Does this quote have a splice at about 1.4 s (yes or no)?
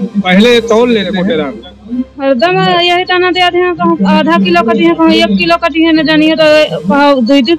yes